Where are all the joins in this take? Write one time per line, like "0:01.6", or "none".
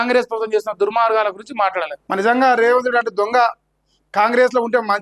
0:02.0